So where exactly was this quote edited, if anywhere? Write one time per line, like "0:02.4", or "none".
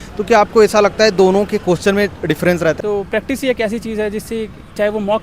0:02.8